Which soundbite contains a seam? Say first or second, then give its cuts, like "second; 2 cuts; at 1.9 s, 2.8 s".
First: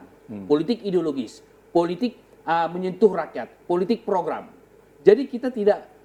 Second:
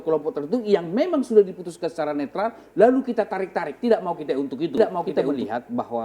second; 1 cut; at 5.0 s